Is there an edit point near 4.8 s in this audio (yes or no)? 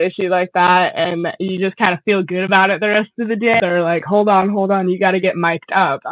no